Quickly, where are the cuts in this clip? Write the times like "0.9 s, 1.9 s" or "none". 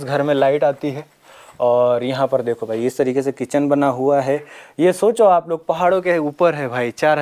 none